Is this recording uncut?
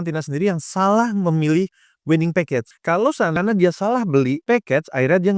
no; 1 cut; at 3.3 s

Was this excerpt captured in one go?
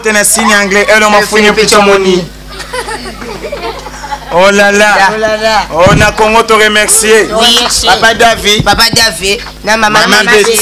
no; 1 cut; at 9.5 s

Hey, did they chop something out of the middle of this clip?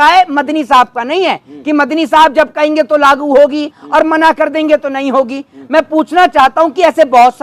no; 0 cuts

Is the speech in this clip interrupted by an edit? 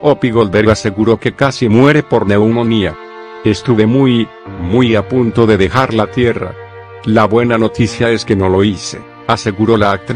no; 0 cuts

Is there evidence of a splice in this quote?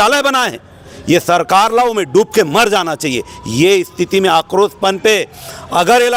no; 0 cuts

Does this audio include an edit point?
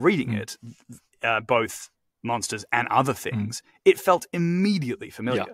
no; 0 cuts

